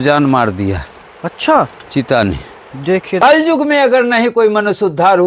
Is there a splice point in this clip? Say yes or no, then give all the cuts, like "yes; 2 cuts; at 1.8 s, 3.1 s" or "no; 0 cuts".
yes; 1 cut; at 3.2 s